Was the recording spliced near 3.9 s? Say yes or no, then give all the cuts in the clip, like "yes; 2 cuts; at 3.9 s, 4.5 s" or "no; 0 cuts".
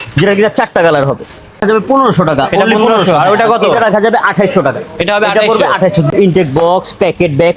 no; 2 cuts; at 1.6 s, 6.1 s